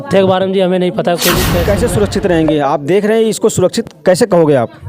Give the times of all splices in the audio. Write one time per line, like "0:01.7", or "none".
0:01.6